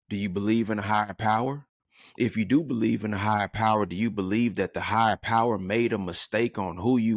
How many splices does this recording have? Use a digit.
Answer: 0